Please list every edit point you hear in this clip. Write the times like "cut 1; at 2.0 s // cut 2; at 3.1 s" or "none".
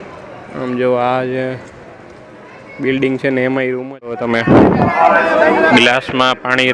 cut 1; at 4.2 s